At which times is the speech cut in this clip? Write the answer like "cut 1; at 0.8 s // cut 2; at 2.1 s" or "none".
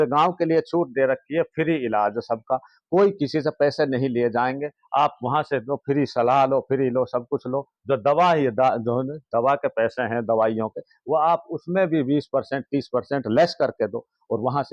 none